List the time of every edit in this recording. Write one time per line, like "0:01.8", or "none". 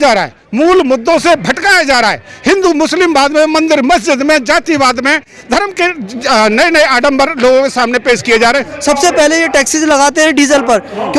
0:08.7